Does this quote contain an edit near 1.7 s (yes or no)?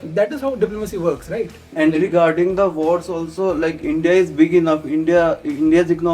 yes